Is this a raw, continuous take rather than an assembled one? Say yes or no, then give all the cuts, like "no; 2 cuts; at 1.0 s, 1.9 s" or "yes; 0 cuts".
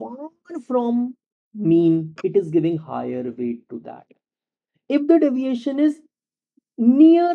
yes; 0 cuts